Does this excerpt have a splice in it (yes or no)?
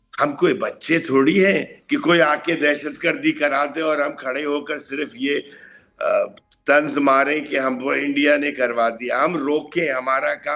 no